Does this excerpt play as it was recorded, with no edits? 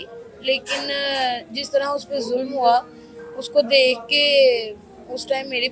yes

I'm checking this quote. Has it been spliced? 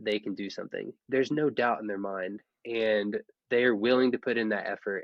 yes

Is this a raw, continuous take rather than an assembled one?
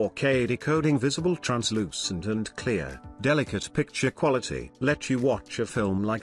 yes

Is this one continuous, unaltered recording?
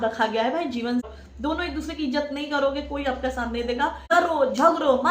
no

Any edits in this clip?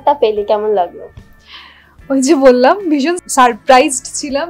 yes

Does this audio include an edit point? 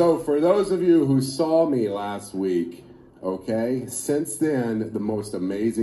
no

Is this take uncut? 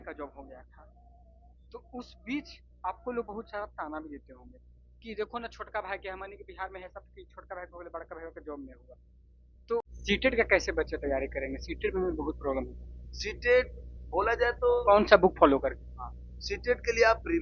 no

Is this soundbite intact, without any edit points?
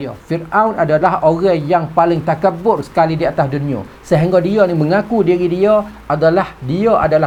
yes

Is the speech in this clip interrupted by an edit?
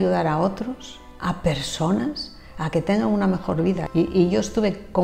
yes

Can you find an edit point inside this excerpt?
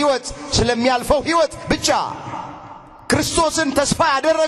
no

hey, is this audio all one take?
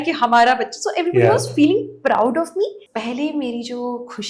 no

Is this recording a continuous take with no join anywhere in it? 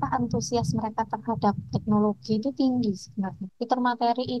no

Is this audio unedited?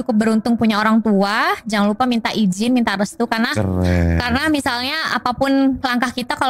yes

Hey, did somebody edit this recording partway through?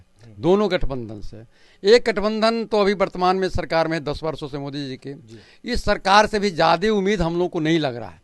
no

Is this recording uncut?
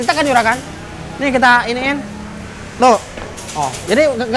yes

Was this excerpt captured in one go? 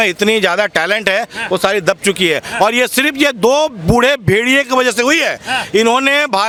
yes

